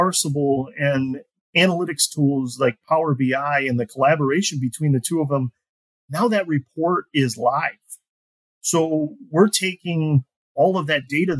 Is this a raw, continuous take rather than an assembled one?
yes; 0 cuts

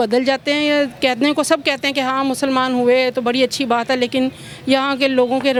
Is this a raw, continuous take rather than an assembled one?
yes; 0 cuts

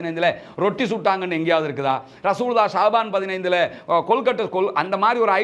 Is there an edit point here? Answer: no; 0 cuts

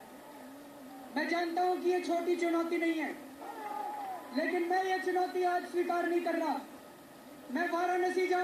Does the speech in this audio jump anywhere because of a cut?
no; 0 cuts

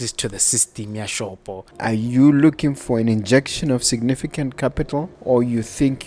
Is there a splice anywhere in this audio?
yes; 2 cuts; at 1.7 s, 5.1 s

